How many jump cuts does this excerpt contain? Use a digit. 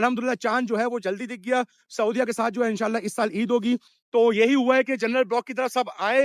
1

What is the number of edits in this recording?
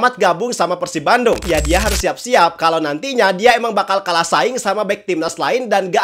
1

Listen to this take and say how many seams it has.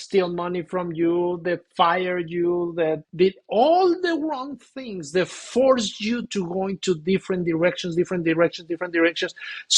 1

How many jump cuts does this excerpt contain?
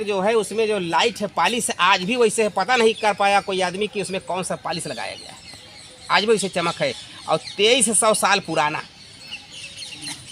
0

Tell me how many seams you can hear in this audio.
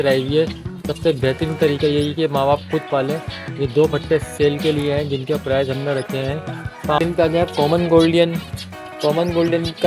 1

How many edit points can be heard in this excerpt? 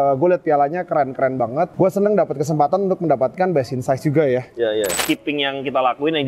2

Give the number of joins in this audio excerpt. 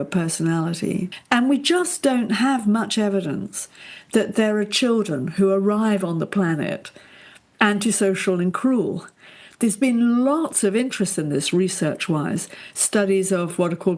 1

